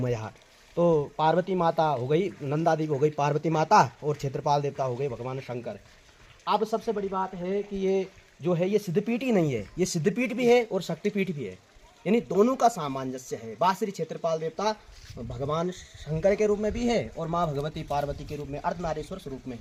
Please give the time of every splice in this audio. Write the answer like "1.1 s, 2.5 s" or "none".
none